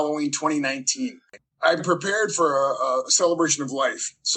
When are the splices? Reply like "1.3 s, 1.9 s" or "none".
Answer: 1.8 s

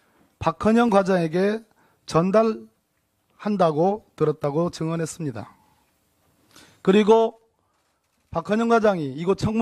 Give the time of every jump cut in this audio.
none

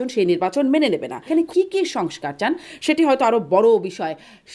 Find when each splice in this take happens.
1.2 s

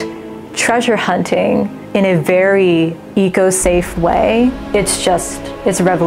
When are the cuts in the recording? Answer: 1.8 s, 3.0 s, 4.6 s

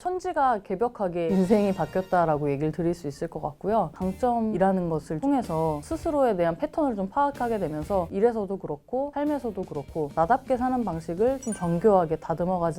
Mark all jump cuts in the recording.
3.9 s, 8.1 s

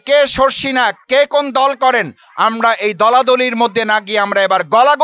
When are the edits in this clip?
1.0 s

